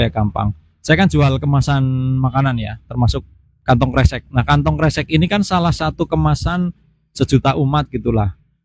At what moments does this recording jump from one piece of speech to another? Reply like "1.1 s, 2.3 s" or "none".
none

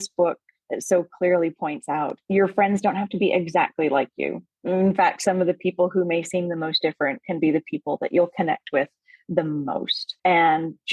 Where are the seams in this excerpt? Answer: 2.2 s, 10.0 s

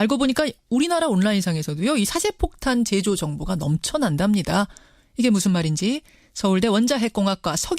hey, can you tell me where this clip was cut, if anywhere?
none

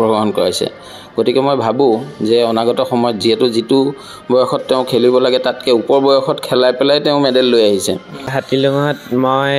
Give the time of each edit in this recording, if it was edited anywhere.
8.4 s

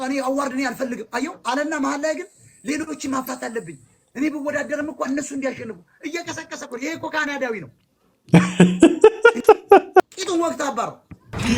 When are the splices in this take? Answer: 10.0 s

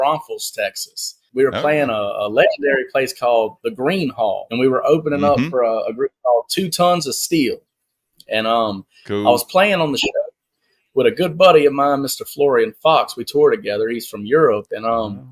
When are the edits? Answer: 1.2 s, 4.5 s

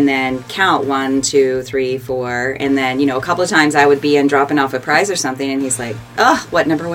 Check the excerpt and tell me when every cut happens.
none

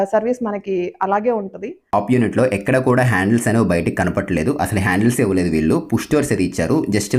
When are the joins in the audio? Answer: 1.9 s

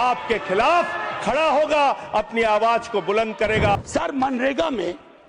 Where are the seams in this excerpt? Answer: 3.8 s

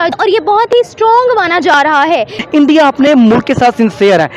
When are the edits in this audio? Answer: 2.4 s

